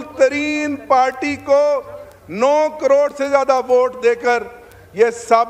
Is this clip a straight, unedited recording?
yes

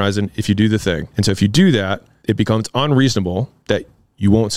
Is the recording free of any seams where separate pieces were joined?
no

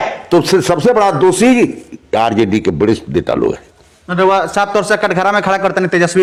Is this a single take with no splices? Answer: yes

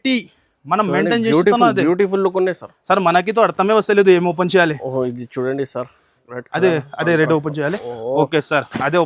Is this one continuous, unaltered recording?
yes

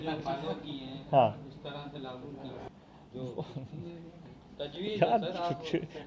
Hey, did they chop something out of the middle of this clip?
yes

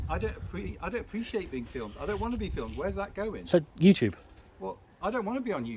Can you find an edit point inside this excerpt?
no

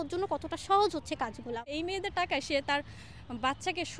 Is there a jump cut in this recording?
yes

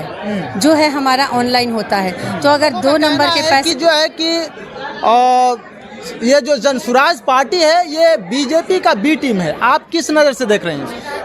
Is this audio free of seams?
no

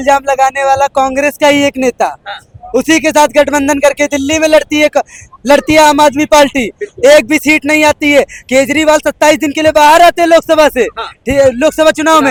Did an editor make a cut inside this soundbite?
no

